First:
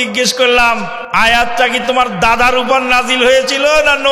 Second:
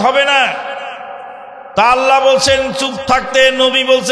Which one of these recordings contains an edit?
first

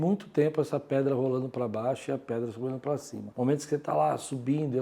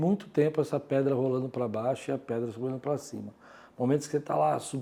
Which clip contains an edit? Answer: first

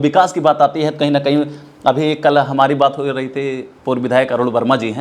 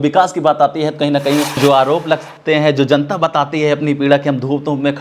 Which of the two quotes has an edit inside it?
second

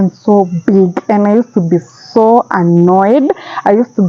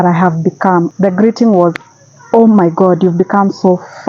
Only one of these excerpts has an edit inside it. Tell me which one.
second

